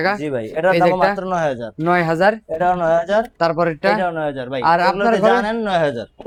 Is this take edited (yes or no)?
no